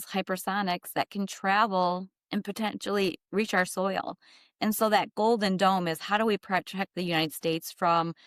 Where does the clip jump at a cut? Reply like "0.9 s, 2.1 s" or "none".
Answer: none